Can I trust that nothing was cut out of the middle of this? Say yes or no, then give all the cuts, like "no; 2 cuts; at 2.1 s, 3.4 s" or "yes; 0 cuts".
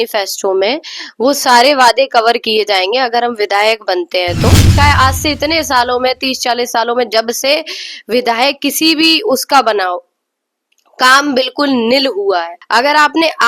no; 2 cuts; at 4.7 s, 12.6 s